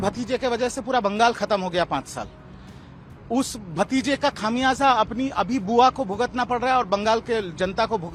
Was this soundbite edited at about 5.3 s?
no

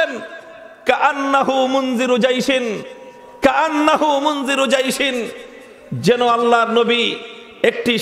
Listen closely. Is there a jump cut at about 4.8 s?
no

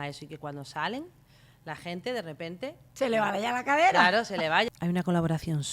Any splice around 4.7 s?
yes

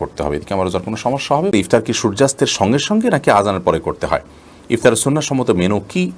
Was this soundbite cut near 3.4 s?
no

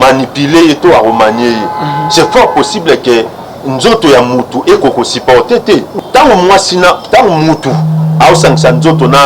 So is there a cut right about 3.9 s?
no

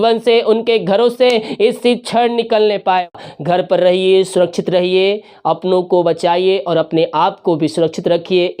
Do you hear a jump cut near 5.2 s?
no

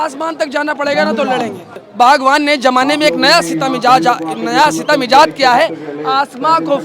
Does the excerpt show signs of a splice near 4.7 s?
no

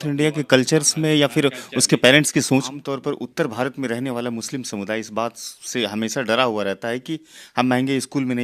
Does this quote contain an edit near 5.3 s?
no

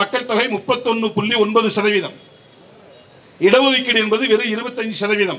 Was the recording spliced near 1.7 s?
no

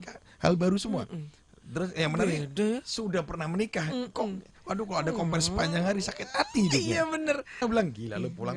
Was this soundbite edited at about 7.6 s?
yes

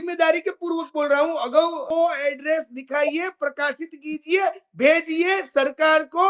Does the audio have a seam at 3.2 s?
no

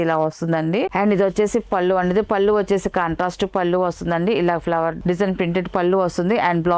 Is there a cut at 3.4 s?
no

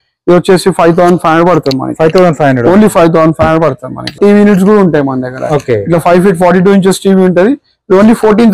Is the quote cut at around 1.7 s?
no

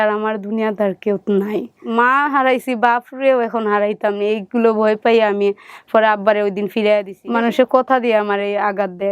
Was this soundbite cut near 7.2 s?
yes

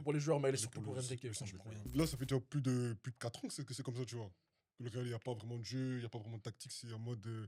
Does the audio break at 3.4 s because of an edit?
no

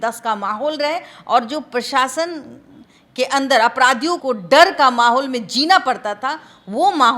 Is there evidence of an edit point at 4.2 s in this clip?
yes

